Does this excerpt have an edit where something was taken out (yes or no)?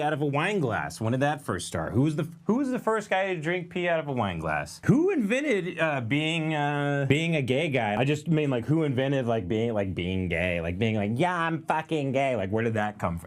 yes